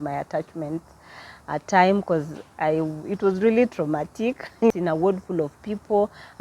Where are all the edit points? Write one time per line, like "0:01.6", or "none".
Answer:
0:04.7